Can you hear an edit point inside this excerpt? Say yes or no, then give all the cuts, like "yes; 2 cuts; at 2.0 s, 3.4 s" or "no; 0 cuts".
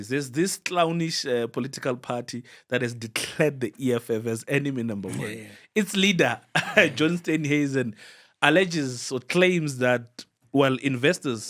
no; 0 cuts